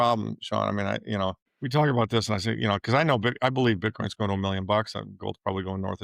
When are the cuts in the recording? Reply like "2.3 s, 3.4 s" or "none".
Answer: 1.5 s